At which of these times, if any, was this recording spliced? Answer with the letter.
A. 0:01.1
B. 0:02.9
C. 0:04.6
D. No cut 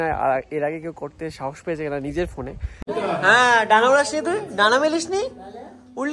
B